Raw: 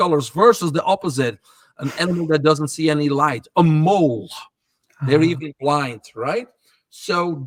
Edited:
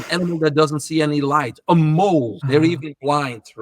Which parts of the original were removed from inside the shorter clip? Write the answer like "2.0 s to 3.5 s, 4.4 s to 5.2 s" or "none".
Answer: 4.3 s to 5.0 s

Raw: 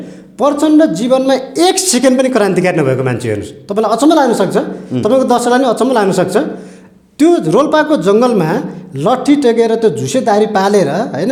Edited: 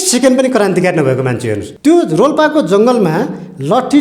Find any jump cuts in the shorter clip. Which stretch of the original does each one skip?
3.4 s to 7.0 s

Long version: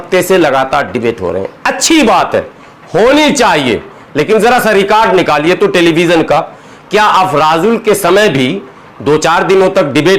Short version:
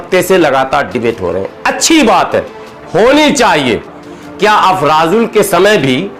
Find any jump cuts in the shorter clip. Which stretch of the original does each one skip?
4.0 s to 6.5 s

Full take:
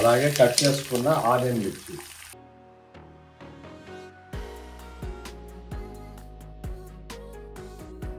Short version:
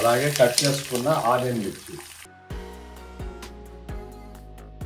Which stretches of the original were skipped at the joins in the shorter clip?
2.3 s to 4.1 s

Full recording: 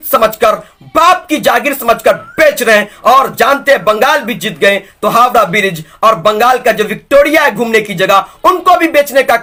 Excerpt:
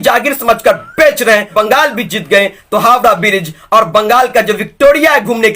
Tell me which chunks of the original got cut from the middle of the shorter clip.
2.9 s to 3.8 s

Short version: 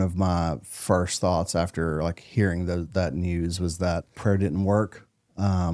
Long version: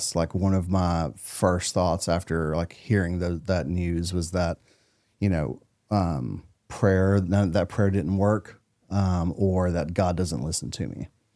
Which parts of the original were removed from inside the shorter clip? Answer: 4.7 s to 7.7 s

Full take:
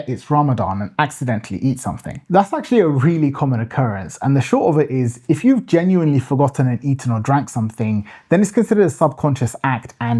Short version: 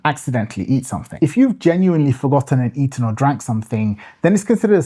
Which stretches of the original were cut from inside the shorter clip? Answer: 2.0 s to 5.2 s

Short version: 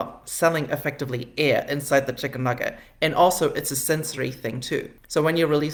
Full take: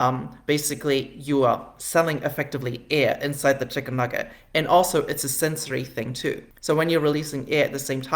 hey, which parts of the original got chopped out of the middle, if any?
none

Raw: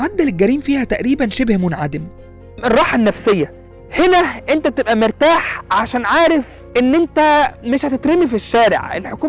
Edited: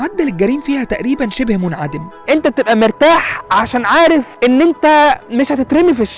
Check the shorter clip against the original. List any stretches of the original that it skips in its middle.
2.2 s to 4.4 s, 6.5 s to 6.6 s

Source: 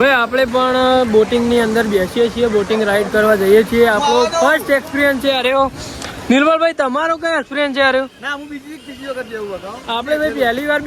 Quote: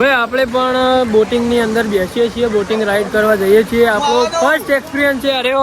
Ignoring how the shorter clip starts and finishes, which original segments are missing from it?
none

